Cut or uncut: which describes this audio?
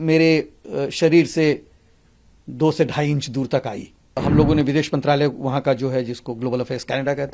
cut